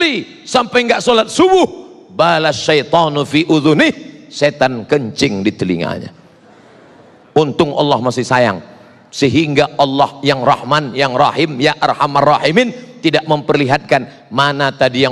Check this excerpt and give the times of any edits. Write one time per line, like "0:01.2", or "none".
none